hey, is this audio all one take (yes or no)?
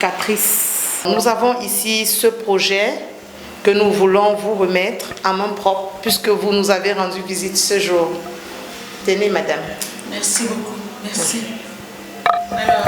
no